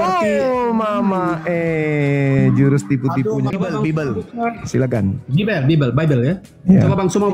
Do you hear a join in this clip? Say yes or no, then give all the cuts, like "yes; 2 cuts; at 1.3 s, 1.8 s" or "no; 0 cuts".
yes; 1 cut; at 3.6 s